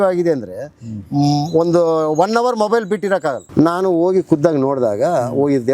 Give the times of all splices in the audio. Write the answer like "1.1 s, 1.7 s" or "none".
3.4 s